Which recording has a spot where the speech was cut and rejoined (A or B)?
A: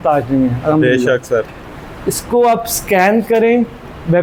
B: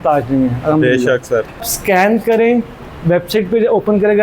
B